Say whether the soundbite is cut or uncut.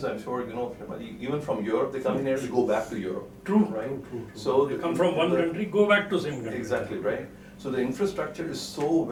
uncut